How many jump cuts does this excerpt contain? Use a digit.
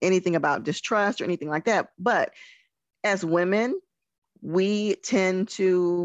0